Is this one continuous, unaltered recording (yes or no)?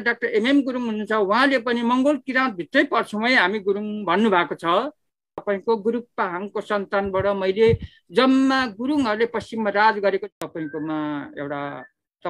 no